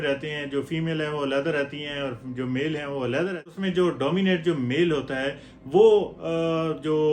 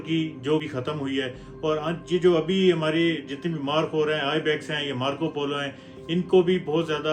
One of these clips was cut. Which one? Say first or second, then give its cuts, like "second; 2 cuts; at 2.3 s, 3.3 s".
first; 1 cut; at 3.6 s